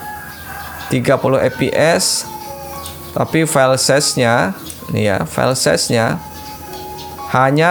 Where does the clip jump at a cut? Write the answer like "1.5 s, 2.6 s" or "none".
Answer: none